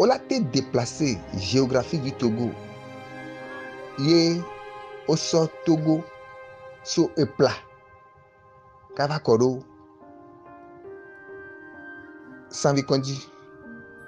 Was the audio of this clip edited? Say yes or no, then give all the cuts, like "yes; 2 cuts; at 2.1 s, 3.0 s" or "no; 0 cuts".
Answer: yes; 3 cuts; at 9.7 s, 12.6 s, 13.2 s